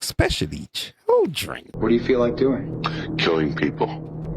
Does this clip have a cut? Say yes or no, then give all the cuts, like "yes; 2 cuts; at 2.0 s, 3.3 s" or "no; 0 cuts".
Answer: yes; 1 cut; at 1.6 s